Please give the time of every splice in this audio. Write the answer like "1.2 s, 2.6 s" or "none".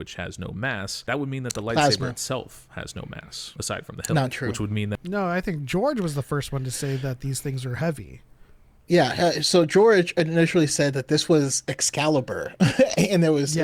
none